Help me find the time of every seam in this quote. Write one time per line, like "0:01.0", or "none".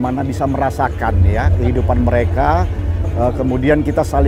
none